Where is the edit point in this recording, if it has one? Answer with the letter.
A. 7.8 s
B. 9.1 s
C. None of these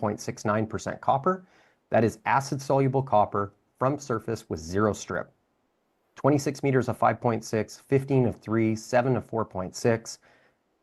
C